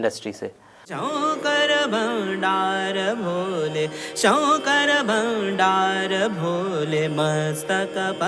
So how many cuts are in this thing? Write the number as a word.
one